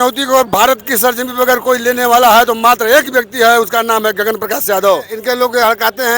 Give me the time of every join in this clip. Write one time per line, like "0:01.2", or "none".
0:05.1